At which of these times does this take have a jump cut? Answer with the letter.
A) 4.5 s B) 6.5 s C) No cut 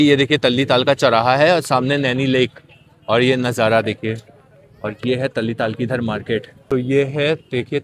B